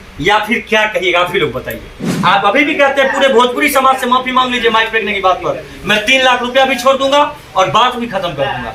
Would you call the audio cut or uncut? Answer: cut